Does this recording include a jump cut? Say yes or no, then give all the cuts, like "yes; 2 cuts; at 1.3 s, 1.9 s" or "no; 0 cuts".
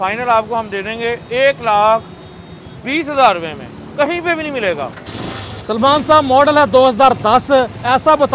yes; 1 cut; at 5.0 s